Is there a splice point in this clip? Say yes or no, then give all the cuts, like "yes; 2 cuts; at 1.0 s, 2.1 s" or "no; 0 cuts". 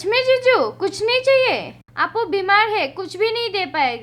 no; 0 cuts